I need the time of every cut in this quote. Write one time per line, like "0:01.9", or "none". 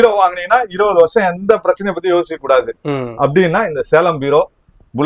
none